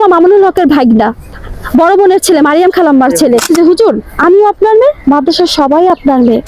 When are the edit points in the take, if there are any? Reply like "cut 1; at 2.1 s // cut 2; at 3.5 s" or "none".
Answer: cut 1; at 1.3 s // cut 2; at 3.5 s